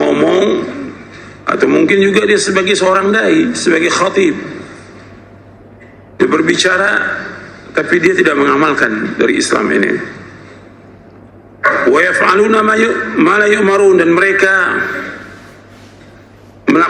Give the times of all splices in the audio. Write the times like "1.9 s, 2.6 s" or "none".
none